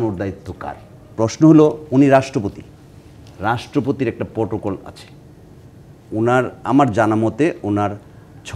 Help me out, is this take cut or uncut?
cut